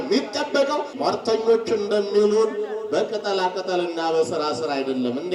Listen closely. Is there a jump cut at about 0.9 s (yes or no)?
yes